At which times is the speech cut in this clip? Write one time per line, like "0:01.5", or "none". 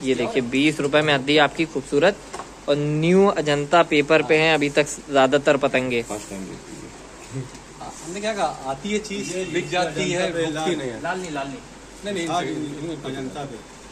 none